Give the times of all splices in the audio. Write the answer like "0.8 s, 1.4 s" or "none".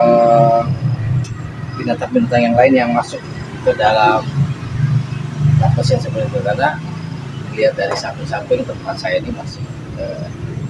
none